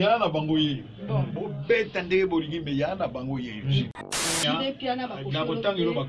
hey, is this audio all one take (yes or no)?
no